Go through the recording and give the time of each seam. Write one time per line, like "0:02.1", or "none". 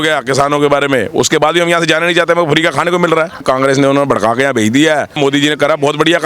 0:03.4
0:05.1